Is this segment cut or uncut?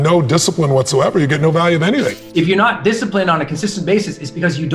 cut